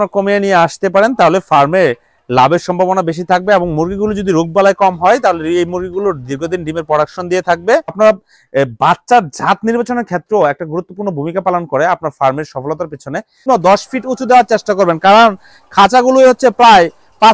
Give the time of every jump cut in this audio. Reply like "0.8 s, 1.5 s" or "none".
7.9 s, 13.4 s